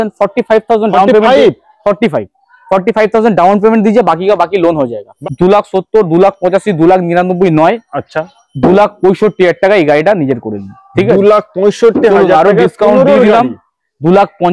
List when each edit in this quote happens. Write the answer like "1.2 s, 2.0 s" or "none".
5.1 s